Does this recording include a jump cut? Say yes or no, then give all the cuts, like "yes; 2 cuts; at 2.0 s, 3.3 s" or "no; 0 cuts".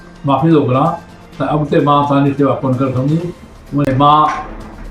yes; 1 cut; at 3.8 s